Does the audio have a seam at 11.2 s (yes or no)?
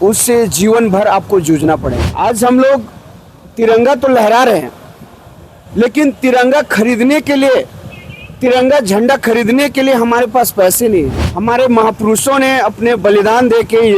yes